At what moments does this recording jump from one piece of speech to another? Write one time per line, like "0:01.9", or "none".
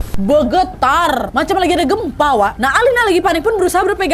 0:01.3
0:02.6